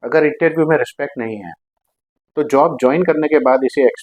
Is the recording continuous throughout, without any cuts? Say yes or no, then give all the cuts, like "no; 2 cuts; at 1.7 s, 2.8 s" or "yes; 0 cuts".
yes; 0 cuts